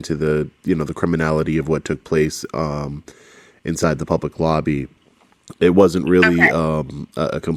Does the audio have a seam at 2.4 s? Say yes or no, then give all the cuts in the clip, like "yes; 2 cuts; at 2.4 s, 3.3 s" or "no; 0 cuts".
no; 0 cuts